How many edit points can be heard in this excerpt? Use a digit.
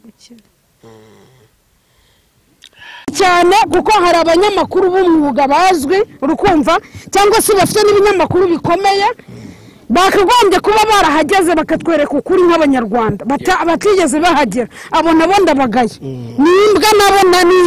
1